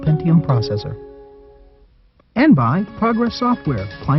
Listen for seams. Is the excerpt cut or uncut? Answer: cut